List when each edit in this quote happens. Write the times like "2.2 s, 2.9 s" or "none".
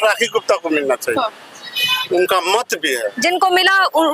none